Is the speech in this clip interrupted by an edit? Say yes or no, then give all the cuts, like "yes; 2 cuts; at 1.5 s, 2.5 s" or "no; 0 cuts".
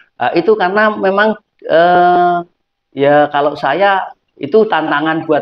no; 0 cuts